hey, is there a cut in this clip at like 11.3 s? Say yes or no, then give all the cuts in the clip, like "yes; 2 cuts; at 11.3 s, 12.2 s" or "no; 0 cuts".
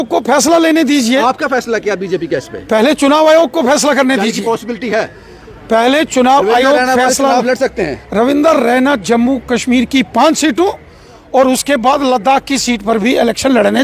no; 0 cuts